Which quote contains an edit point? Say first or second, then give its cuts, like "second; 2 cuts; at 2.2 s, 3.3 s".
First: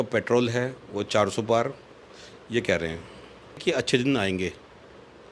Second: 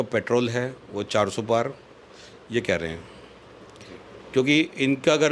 first; 1 cut; at 3.6 s